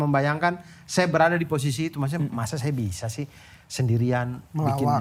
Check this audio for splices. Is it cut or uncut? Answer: uncut